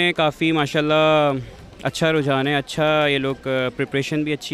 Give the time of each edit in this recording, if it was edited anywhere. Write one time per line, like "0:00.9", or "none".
none